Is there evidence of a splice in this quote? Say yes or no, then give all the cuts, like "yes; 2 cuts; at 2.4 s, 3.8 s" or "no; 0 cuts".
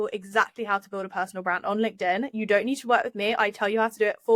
no; 0 cuts